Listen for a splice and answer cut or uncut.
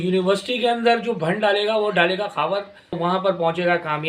cut